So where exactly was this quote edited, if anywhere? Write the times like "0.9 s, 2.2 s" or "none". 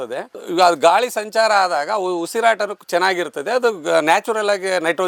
none